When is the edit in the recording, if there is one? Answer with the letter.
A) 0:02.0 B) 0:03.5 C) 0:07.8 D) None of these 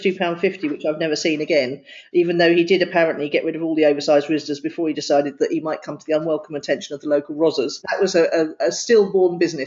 C